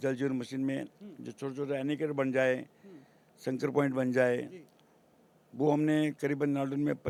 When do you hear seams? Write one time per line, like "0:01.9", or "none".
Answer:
none